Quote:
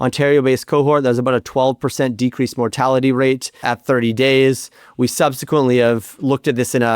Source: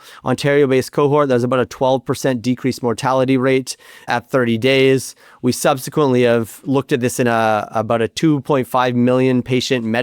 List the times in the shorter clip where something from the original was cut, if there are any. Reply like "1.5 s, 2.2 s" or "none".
3.5 s